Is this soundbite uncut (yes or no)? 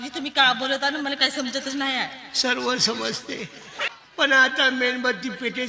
no